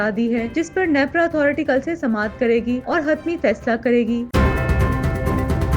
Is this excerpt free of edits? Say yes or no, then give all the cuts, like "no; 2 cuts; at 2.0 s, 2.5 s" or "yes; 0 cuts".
no; 1 cut; at 4.3 s